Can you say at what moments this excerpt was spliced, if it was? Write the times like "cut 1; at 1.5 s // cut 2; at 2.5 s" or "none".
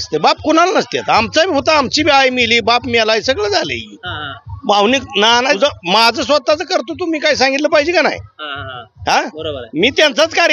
none

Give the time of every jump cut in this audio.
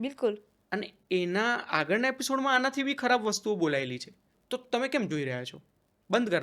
cut 1; at 4.3 s

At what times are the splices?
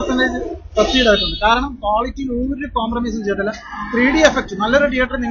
none

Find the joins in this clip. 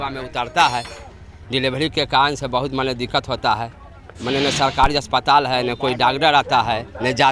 cut 1; at 4.1 s

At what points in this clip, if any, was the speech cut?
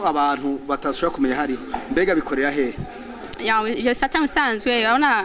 none

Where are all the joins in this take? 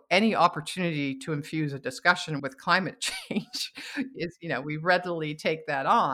cut 1; at 2.4 s

